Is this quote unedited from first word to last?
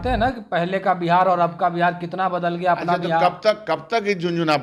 yes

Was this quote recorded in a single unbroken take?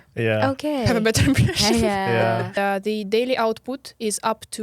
no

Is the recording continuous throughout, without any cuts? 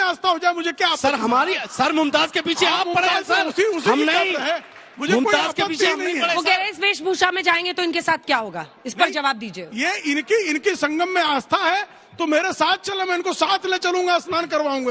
yes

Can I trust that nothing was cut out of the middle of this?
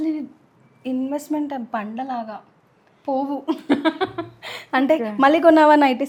yes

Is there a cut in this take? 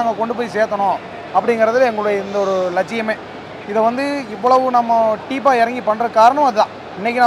no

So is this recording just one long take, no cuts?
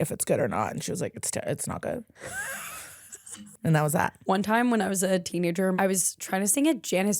no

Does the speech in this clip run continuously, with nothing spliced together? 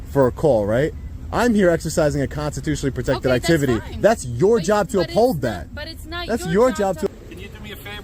no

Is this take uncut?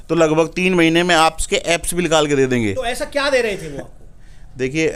yes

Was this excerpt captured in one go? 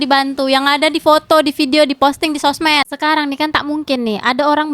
no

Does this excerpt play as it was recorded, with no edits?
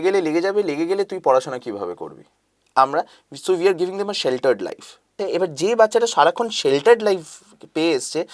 no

